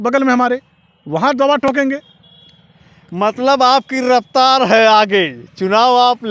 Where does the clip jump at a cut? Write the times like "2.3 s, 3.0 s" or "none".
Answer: none